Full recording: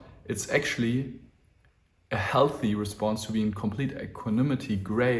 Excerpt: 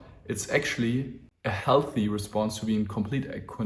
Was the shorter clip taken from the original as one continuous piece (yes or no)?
no